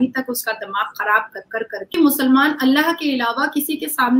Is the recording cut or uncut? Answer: cut